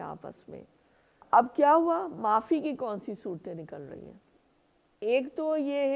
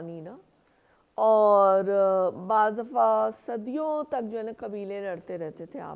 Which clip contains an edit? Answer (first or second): first